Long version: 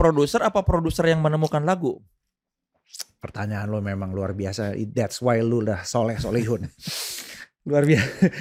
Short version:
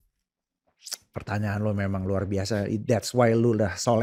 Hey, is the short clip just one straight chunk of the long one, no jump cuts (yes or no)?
yes